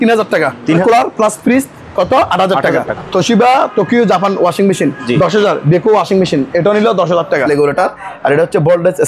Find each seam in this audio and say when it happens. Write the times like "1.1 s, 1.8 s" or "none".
0.8 s, 2.9 s, 7.4 s